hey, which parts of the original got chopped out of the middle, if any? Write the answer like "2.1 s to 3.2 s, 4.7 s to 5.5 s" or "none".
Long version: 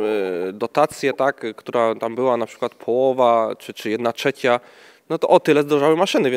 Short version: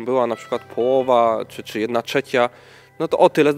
none